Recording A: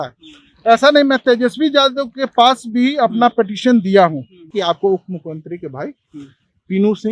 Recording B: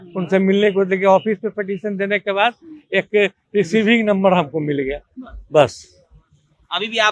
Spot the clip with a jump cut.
A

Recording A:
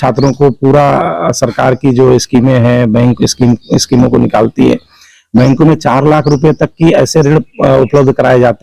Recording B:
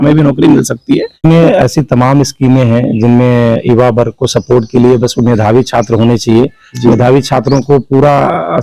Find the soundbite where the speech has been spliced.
B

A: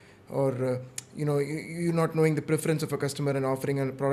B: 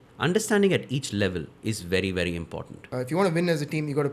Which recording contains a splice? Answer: B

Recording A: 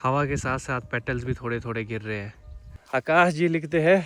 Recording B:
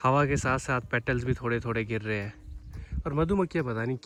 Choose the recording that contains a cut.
A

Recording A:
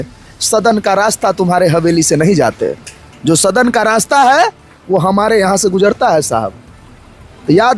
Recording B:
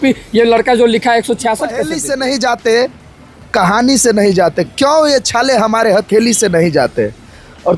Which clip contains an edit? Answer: B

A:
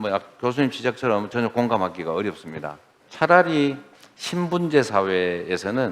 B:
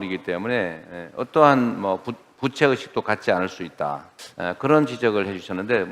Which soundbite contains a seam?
A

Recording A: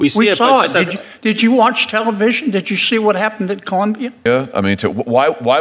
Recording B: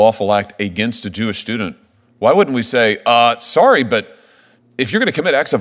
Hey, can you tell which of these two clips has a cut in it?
A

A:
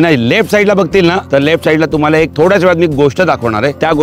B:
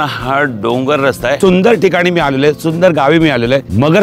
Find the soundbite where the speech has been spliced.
B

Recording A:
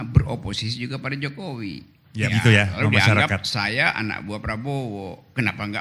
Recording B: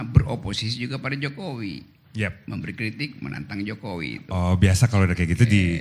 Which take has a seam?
A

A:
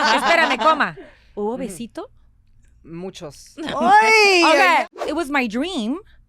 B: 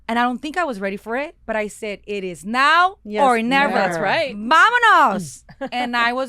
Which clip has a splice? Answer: A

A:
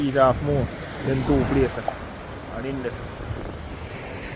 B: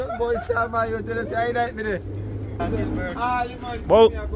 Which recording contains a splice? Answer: B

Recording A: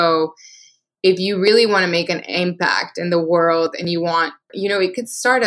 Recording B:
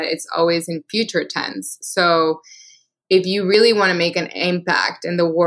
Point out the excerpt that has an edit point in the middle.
A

